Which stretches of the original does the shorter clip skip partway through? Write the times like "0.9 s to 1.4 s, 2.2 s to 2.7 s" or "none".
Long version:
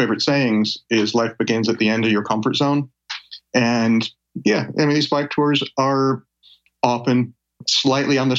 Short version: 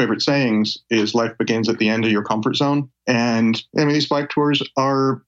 2.9 s to 3.4 s, 4.1 s to 4.7 s